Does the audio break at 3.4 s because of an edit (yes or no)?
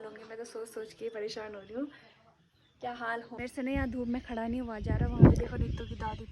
yes